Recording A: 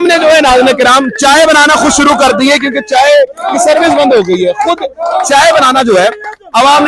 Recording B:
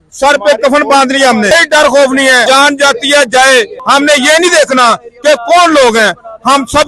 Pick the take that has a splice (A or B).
B